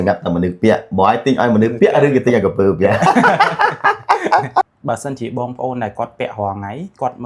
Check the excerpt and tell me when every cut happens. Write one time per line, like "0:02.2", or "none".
0:04.7